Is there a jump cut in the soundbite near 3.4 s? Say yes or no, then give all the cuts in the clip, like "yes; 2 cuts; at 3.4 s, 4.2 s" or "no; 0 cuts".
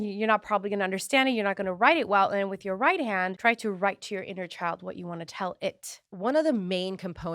yes; 2 cuts; at 3.4 s, 6.1 s